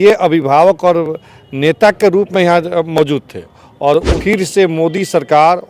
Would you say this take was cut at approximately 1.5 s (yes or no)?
no